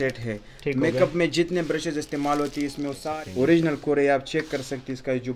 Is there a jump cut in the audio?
yes; 1 cut; at 3.1 s

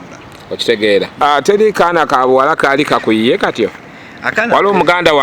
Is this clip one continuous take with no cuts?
no; 1 cut; at 1.2 s

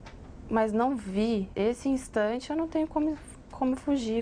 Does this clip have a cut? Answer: yes; 1 cut; at 1.5 s

